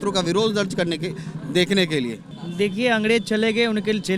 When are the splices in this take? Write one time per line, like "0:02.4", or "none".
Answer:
0:02.3